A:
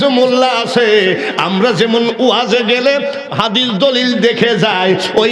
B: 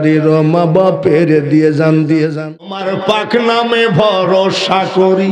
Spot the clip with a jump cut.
B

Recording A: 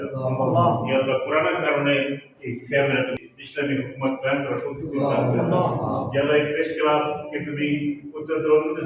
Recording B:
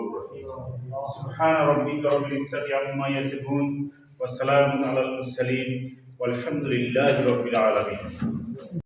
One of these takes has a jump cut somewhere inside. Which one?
A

